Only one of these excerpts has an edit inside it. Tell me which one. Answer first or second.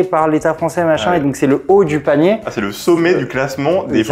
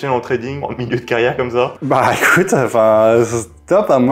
second